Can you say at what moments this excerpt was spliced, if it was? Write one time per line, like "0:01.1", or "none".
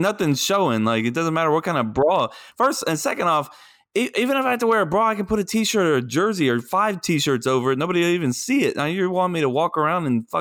none